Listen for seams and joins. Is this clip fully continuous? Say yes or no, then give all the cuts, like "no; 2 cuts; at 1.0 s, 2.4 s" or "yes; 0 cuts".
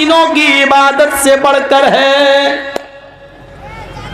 yes; 0 cuts